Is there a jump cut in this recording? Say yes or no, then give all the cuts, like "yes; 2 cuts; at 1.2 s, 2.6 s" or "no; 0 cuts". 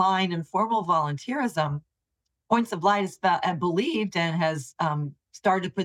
no; 0 cuts